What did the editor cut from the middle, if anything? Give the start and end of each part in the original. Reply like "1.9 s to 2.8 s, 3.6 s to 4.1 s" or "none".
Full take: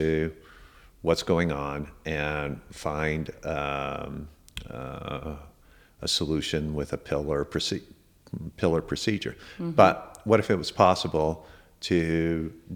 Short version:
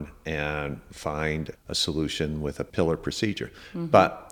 3.3 s to 5.9 s, 7.0 s to 8.5 s